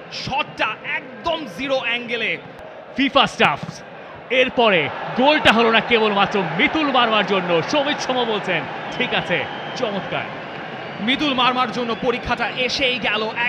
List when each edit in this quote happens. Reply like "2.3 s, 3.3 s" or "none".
2.6 s